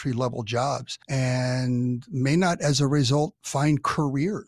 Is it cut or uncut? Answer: cut